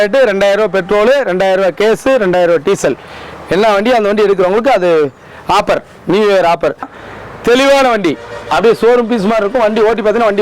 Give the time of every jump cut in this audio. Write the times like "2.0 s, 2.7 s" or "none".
6.9 s